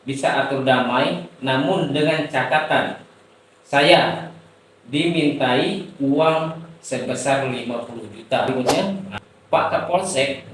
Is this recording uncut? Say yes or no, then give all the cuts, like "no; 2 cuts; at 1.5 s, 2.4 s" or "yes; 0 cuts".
no; 1 cut; at 8.5 s